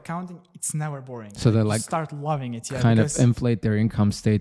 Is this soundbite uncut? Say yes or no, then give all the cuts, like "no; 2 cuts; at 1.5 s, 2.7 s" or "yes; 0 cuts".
yes; 0 cuts